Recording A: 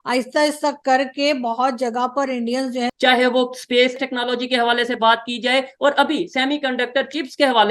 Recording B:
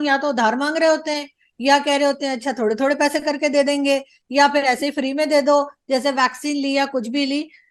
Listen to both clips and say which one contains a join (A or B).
A